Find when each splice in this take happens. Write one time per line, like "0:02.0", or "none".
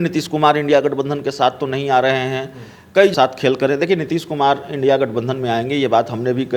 0:03.1

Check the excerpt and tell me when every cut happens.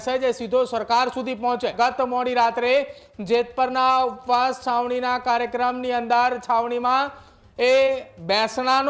0:01.7

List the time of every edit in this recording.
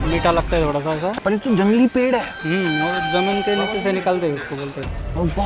none

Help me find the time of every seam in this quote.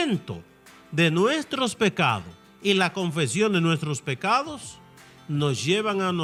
none

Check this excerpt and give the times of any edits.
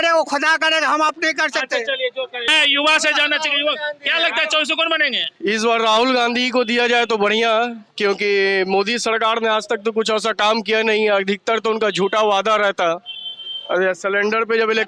none

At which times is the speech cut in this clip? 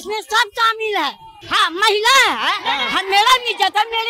0:01.3

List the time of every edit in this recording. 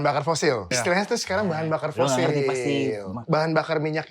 0:00.8
0:03.2

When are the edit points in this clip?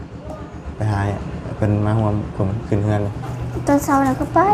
none

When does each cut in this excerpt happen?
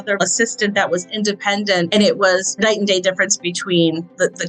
0:01.9
0:02.6

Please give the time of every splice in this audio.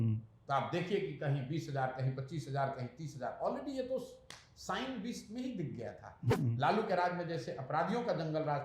0:06.2

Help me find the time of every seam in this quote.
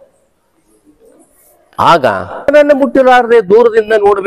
0:02.5

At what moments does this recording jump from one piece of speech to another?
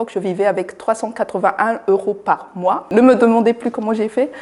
0:02.9

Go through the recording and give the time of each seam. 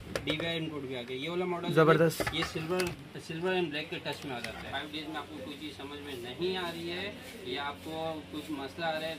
0:04.7

